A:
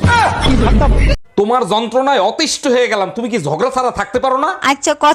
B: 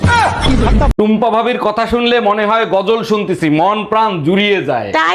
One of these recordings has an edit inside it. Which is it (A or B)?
A